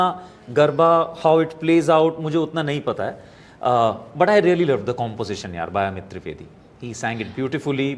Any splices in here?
no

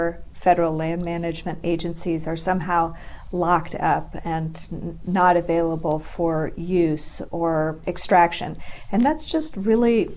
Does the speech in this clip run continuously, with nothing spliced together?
no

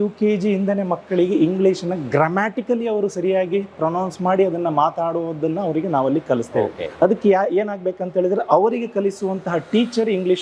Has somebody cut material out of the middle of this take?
no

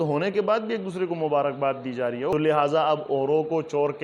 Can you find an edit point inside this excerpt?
yes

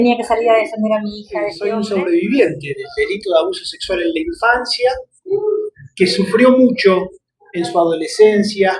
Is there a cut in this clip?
yes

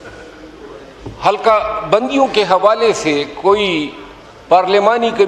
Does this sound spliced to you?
no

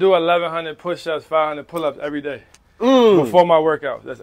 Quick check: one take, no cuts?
yes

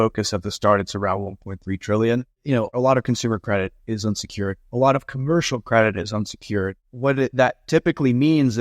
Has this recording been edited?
yes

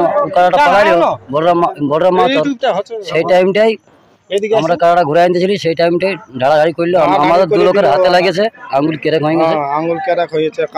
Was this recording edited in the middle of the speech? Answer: no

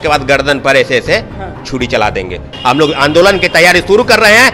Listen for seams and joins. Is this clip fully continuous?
no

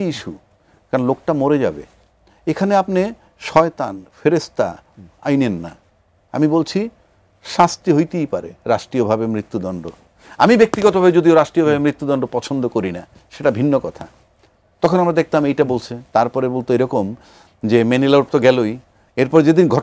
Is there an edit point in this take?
no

